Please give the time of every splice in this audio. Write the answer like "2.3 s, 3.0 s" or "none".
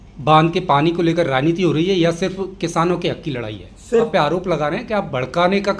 4.1 s